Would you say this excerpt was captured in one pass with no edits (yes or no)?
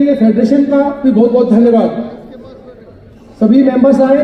yes